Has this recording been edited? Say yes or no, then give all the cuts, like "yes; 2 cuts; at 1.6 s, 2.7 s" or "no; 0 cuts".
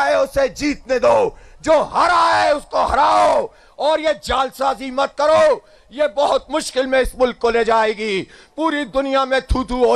no; 0 cuts